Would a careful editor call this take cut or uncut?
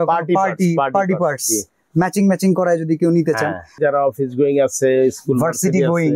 cut